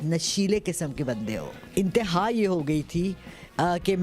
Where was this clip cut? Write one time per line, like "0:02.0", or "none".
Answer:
0:01.5